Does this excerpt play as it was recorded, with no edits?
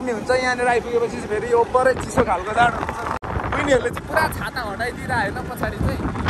no; 1 cut; at 3.2 s

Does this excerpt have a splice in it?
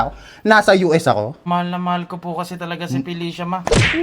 yes; 1 cut; at 1.4 s

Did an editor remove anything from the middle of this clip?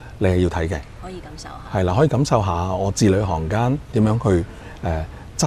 yes; 1 cut; at 3.8 s

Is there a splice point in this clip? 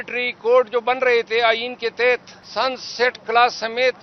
yes; 1 cut; at 2.4 s

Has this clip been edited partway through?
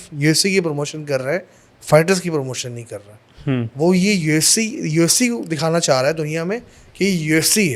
no; 0 cuts

